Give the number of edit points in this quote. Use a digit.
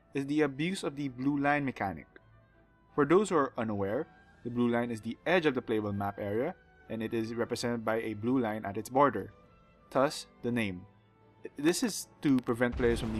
1